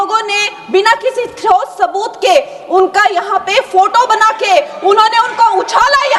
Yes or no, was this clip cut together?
no